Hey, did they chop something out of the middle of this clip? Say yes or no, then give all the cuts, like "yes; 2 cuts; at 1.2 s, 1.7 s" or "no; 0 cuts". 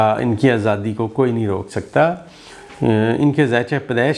no; 0 cuts